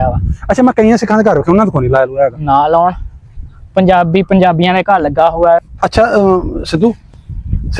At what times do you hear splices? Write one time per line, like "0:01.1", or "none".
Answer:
0:05.7